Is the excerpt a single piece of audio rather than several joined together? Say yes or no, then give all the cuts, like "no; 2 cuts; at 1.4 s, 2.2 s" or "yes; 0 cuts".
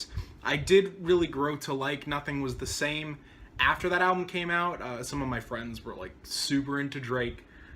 no; 1 cut; at 1.3 s